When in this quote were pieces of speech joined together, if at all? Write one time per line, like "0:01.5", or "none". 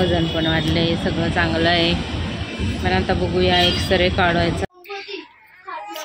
0:04.6